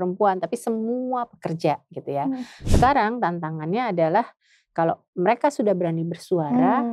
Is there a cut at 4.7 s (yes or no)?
no